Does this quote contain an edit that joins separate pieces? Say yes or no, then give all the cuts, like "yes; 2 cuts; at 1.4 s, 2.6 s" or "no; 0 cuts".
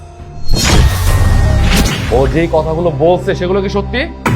yes; 1 cut; at 1.9 s